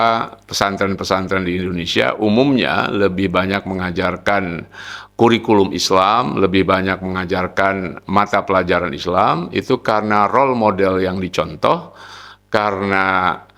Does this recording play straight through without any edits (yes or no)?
yes